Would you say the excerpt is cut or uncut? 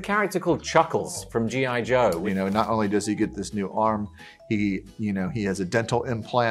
cut